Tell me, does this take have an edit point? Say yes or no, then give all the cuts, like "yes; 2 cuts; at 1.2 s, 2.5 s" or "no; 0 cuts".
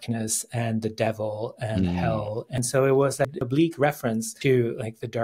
yes; 3 cuts; at 2.5 s, 3.4 s, 4.3 s